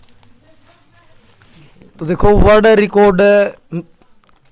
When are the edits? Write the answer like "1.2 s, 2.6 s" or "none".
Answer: none